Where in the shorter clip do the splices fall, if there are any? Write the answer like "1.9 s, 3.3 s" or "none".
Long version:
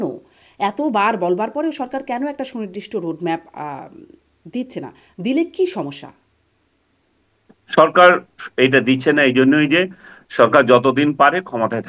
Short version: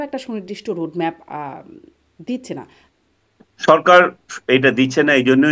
2.8 s